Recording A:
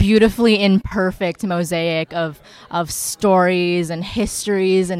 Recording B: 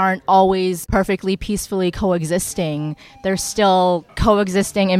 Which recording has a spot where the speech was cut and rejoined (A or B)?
B